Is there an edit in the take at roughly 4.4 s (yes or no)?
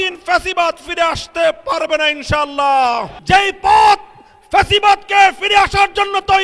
no